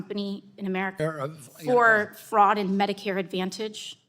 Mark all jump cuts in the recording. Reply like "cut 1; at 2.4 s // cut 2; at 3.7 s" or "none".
cut 1; at 1.0 s